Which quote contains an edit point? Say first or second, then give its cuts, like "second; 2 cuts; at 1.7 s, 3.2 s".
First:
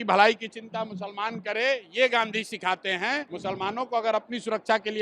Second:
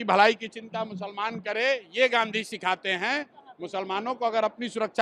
first; 1 cut; at 3.3 s